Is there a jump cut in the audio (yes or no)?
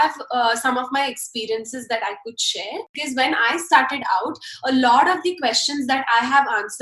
yes